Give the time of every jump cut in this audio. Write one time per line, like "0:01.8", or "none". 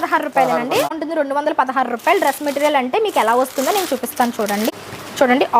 0:01.0
0:04.7